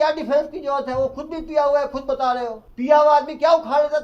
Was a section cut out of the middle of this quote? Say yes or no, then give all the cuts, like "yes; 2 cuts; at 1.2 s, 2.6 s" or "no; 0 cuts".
yes; 1 cut; at 2.6 s